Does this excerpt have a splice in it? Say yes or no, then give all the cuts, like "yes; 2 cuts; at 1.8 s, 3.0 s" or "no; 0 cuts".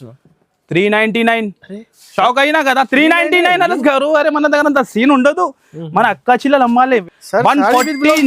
yes; 1 cut; at 7.0 s